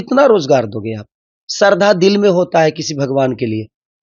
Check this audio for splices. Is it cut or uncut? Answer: uncut